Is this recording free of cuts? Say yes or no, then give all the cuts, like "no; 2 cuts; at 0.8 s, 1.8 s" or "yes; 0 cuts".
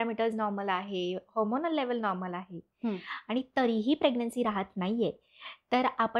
yes; 0 cuts